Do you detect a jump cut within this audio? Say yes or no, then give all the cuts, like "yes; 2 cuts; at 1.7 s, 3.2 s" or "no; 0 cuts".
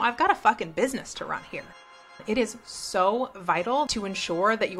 yes; 2 cuts; at 2.2 s, 3.9 s